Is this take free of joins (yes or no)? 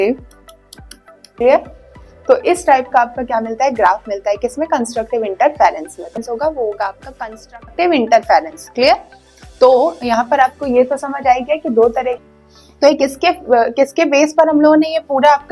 no